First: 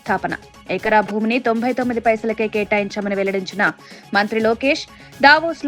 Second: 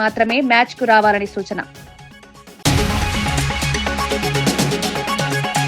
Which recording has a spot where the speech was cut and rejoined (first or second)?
second